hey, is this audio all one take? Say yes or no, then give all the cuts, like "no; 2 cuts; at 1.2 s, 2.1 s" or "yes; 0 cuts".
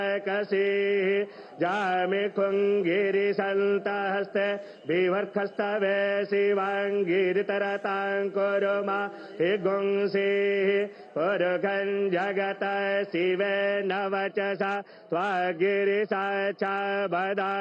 yes; 0 cuts